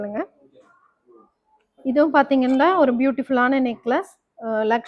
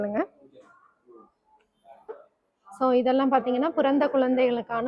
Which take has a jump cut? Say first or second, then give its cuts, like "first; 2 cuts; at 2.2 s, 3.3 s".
second; 1 cut; at 1.8 s